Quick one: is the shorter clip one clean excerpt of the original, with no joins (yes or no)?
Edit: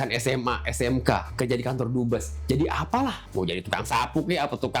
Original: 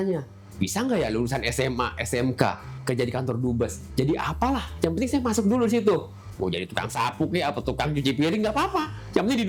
no